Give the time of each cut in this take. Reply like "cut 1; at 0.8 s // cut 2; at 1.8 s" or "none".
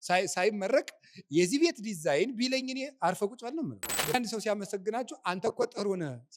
cut 1; at 4.0 s